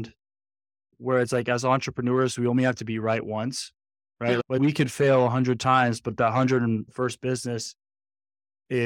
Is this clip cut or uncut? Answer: uncut